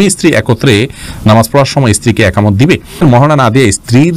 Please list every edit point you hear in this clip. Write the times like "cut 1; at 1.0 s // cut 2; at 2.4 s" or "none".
cut 1; at 3.0 s